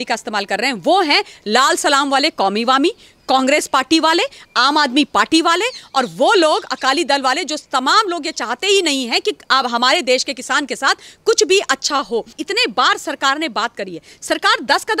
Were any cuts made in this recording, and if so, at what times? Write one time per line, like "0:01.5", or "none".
0:12.4